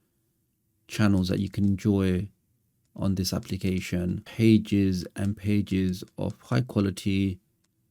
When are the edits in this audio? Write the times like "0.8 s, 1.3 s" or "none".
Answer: 4.3 s